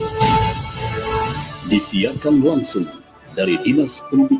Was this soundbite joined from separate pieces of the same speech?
yes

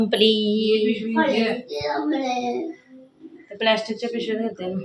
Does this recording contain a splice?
no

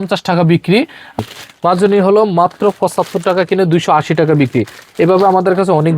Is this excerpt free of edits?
no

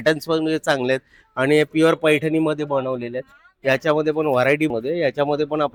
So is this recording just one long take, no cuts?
yes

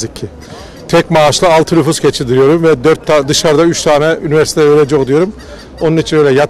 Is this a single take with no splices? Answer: yes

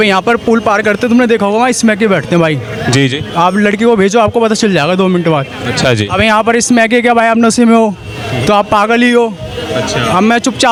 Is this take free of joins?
yes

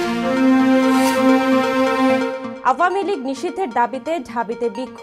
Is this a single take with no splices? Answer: no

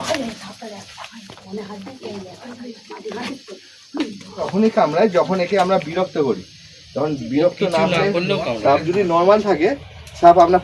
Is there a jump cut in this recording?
yes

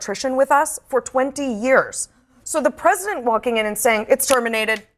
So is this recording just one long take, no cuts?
yes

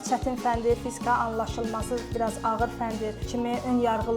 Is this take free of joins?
no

